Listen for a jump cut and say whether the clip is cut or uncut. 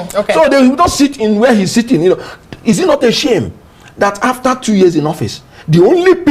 uncut